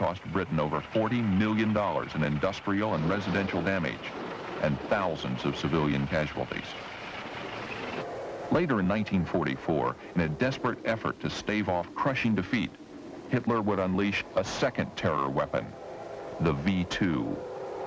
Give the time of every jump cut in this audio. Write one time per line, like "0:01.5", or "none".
0:09.8